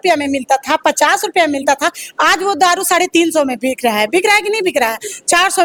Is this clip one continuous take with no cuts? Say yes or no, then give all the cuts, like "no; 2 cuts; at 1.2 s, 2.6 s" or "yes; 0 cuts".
yes; 0 cuts